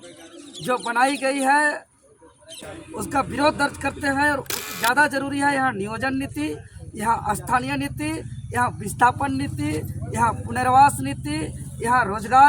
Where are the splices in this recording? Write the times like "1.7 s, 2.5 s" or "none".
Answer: 2.6 s, 4.6 s

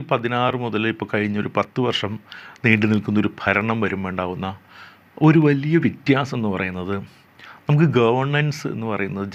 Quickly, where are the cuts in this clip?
none

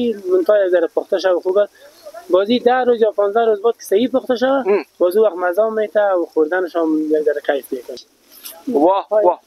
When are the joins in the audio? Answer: 7.9 s

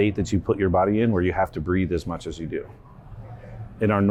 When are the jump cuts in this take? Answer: none

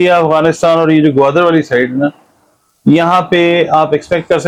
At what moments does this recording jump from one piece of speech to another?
none

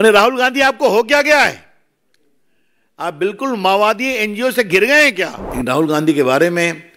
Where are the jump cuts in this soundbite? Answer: 5.4 s

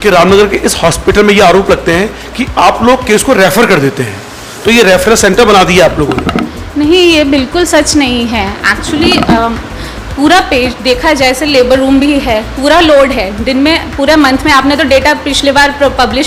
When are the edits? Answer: none

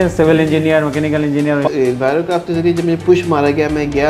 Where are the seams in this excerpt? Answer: 1.7 s

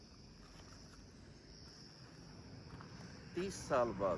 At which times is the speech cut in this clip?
3.0 s

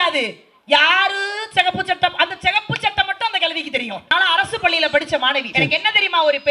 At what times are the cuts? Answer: 4.1 s, 5.5 s

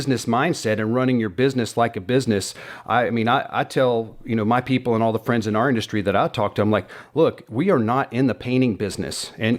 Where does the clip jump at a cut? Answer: none

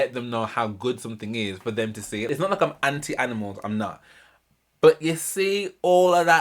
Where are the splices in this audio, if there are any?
2.2 s

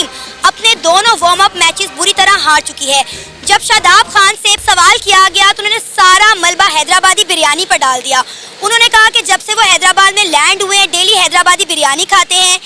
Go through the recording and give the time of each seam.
none

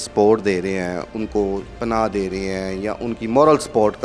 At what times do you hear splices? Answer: none

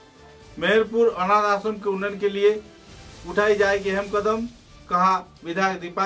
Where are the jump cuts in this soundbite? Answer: none

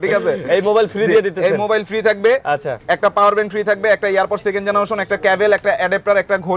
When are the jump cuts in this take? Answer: none

